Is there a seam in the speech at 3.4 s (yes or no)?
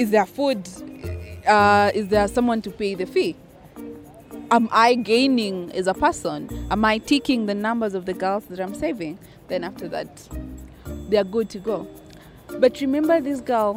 no